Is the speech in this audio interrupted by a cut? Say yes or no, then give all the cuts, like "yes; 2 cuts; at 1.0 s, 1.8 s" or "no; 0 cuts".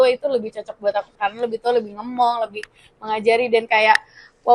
yes; 1 cut; at 1.1 s